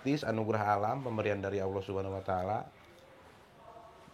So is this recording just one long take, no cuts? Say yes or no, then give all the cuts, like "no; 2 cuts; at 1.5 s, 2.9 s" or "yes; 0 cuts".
yes; 0 cuts